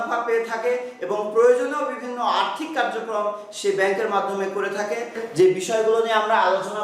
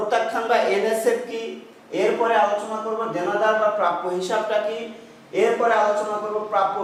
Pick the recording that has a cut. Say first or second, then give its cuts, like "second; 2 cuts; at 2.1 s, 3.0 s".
first; 1 cut; at 5.2 s